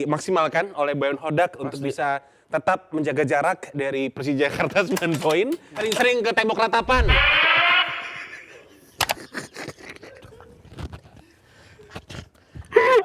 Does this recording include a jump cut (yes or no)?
yes